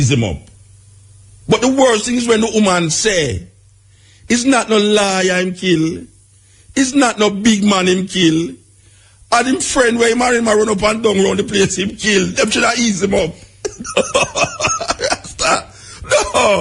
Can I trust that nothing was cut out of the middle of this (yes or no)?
yes